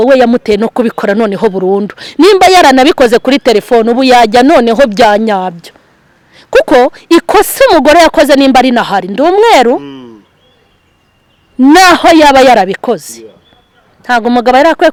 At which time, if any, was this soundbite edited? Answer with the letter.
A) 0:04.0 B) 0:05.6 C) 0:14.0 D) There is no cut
D